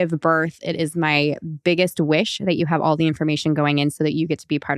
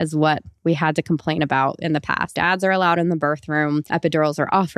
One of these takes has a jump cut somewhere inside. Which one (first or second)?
second